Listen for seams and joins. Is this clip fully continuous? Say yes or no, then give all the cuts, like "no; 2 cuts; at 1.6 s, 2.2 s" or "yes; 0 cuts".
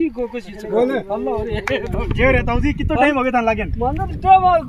yes; 0 cuts